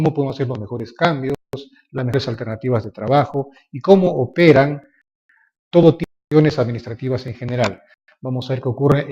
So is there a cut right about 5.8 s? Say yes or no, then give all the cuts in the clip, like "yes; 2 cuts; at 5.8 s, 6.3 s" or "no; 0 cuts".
no; 1 cut; at 3.9 s